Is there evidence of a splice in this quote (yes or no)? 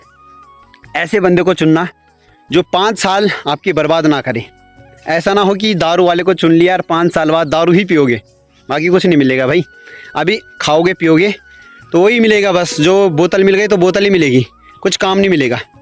no